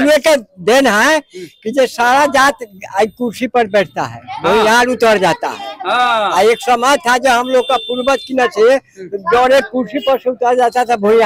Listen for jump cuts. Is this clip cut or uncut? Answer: uncut